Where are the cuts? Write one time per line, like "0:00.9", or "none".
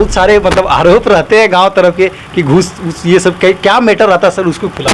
none